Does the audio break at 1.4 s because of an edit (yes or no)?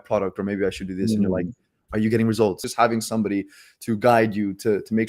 no